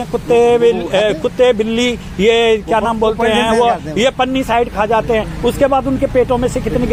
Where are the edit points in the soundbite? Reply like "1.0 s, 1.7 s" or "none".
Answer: none

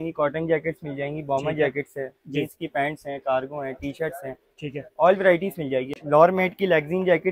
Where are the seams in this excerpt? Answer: 5.9 s

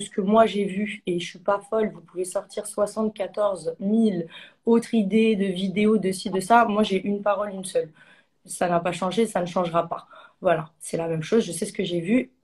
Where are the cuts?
none

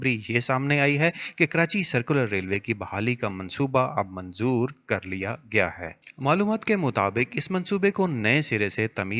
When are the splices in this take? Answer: none

